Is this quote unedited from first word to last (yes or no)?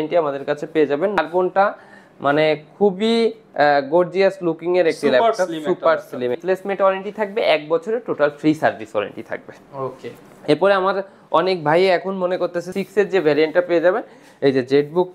no